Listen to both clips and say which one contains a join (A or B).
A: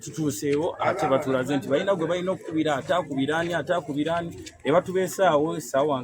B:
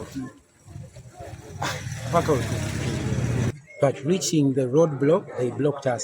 B